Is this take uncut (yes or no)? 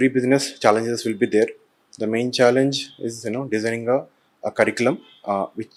yes